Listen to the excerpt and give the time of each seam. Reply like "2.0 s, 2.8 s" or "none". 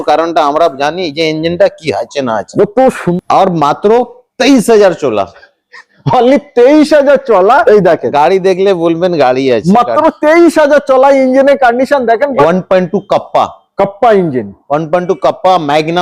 3.1 s, 7.6 s, 12.4 s